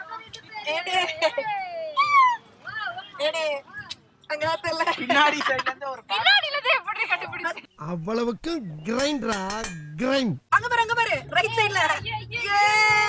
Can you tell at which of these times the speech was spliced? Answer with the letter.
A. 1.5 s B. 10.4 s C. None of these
C